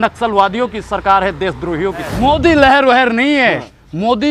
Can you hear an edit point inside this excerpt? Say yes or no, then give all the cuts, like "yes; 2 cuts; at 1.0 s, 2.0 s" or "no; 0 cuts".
yes; 1 cut; at 2.1 s